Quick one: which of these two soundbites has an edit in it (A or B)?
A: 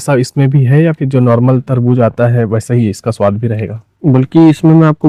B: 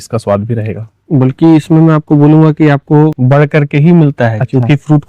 B